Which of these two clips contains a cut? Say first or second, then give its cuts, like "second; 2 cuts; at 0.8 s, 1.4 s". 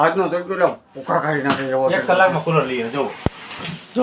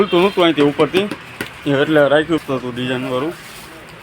second; 1 cut; at 2.4 s